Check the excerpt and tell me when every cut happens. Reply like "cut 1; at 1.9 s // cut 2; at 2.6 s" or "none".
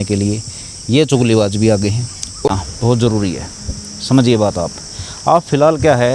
cut 1; at 2.5 s